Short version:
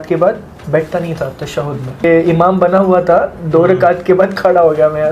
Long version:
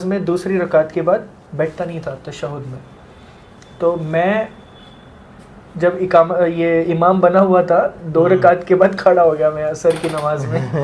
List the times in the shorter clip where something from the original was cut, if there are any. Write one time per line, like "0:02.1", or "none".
0:02.0